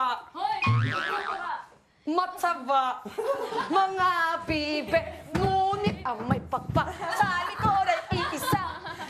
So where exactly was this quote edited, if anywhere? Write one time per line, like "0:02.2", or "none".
none